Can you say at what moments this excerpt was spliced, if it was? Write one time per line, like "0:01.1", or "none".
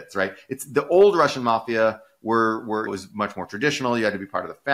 none